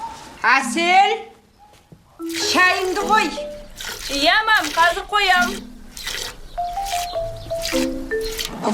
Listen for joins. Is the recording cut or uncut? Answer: uncut